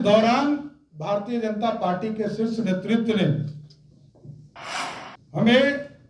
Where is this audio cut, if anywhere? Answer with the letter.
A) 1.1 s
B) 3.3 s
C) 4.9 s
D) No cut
D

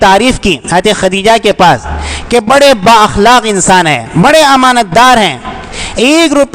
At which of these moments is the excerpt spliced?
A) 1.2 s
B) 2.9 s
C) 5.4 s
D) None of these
D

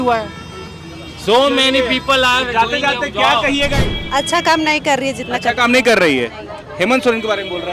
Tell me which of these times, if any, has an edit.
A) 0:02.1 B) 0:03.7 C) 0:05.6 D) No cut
B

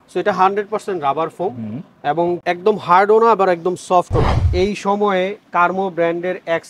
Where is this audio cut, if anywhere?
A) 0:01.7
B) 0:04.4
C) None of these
B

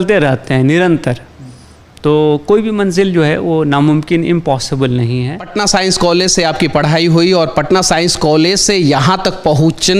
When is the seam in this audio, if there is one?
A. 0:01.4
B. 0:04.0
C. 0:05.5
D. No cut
C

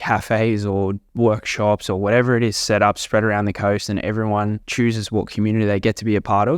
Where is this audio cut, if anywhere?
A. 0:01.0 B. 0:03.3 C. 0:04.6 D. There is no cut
C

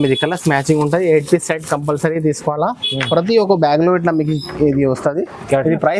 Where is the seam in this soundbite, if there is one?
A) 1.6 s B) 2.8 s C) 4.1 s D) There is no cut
D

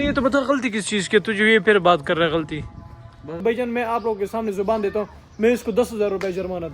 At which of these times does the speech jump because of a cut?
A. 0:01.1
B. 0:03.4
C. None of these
B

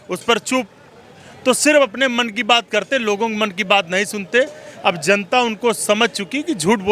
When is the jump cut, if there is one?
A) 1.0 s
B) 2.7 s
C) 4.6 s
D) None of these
D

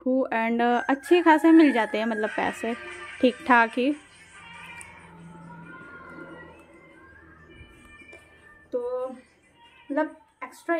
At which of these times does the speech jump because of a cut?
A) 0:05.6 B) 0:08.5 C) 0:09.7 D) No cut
D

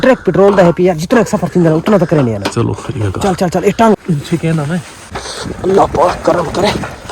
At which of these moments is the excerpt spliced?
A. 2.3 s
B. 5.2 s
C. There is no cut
B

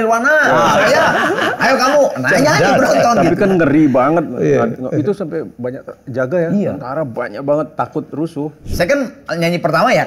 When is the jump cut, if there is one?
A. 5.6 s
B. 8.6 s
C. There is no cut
B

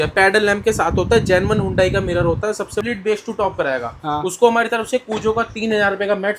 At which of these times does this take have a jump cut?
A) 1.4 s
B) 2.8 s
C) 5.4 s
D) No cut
B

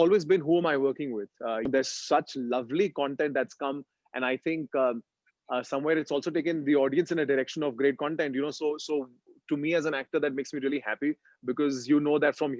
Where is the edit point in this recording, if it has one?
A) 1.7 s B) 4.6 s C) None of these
A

